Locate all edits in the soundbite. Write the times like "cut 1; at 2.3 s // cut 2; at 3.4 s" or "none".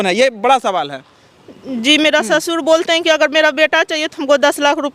none